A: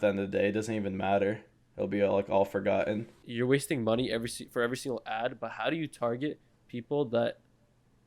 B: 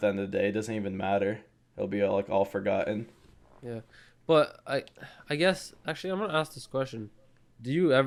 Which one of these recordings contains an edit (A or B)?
A